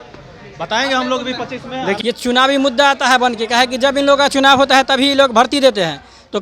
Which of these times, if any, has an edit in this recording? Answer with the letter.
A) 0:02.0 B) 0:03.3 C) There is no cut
A